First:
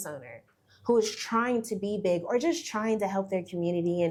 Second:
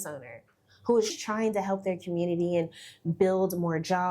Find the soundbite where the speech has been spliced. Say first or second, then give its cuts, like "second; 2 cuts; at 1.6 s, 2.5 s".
second; 1 cut; at 1.2 s